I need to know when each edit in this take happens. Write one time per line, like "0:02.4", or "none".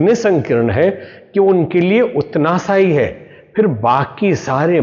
none